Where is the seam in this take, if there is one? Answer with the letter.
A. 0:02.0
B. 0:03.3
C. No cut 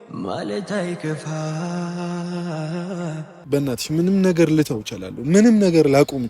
B